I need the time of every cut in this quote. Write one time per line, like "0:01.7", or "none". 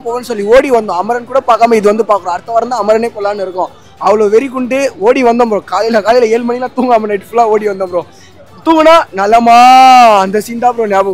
none